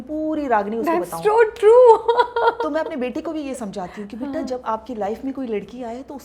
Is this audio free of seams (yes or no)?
yes